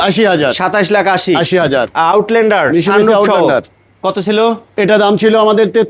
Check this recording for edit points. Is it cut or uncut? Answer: uncut